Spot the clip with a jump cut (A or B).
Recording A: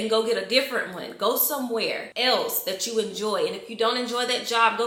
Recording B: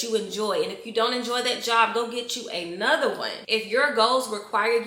B